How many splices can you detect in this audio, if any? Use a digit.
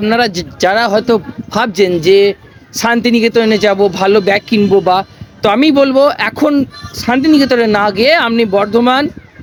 0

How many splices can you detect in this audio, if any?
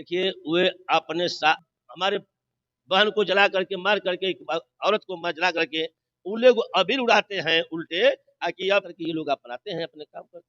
2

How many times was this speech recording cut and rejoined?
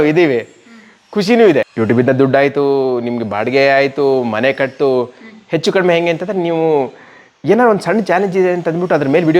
1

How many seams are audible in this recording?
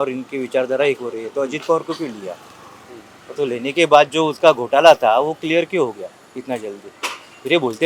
0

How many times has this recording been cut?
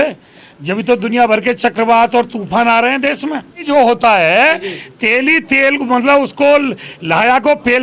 1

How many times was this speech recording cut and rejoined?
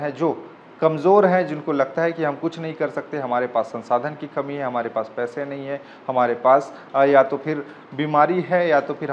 0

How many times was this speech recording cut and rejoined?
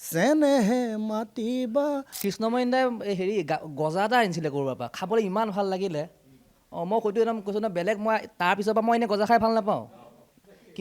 1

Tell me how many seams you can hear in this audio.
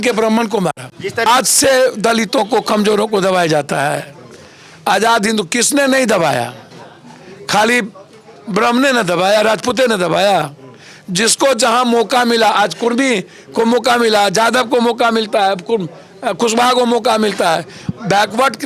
1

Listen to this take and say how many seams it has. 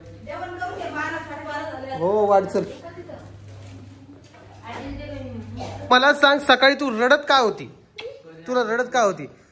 1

